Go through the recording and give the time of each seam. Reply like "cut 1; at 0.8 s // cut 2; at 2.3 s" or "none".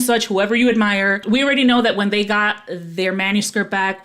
cut 1; at 1.2 s

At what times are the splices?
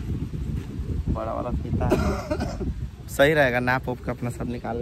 none

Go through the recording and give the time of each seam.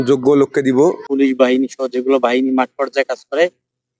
cut 1; at 1.0 s

